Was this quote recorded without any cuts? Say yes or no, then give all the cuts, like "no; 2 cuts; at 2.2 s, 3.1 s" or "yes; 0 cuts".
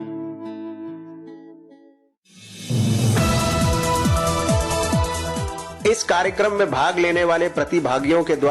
no; 1 cut; at 2.2 s